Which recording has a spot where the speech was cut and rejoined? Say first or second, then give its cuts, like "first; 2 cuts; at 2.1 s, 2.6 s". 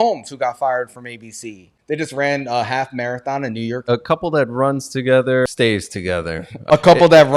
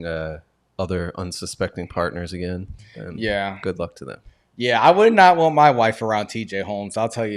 first; 4 cuts; at 1.7 s, 3.8 s, 5.5 s, 6.6 s